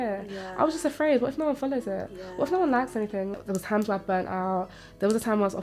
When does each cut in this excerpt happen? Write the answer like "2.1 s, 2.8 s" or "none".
3.4 s